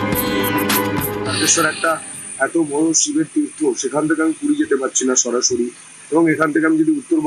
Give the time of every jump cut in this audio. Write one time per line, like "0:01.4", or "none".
0:01.4